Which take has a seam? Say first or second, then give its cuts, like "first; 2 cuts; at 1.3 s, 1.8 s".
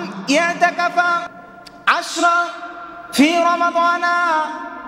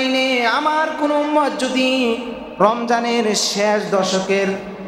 first; 1 cut; at 1.4 s